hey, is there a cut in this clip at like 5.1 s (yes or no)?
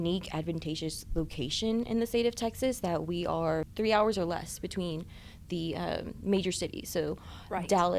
no